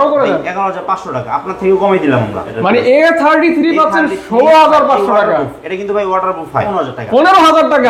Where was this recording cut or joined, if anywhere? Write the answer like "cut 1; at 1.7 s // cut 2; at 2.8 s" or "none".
cut 1; at 2.5 s // cut 2; at 6.7 s

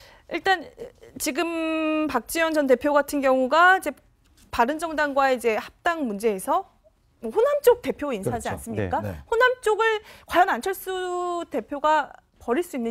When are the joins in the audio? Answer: cut 1; at 6.8 s

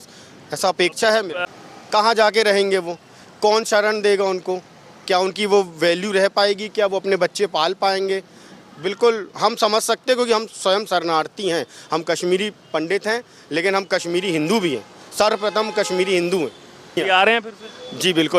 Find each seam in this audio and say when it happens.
cut 1; at 1.4 s // cut 2; at 16.9 s

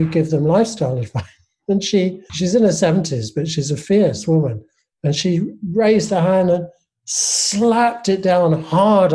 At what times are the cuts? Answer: cut 1; at 2.3 s

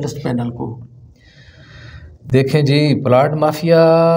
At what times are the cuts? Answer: none

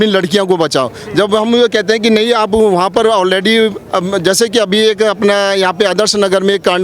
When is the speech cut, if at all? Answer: none

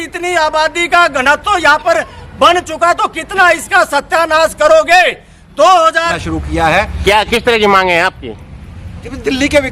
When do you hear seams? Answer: cut 1; at 6.2 s

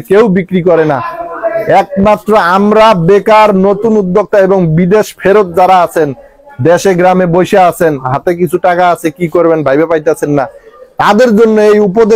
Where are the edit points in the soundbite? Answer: none

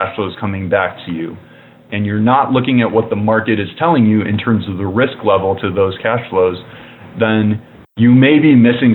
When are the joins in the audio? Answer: none

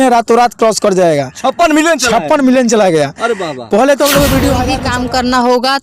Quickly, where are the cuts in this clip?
cut 1; at 4.8 s

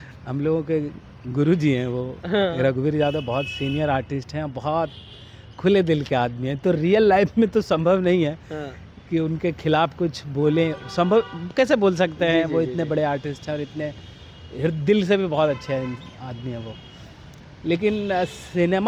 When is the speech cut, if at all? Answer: none

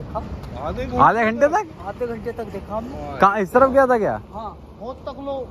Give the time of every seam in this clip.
none

